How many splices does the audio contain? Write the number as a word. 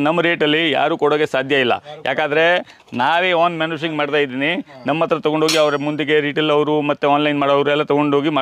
zero